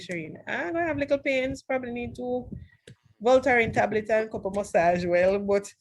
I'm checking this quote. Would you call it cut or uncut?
uncut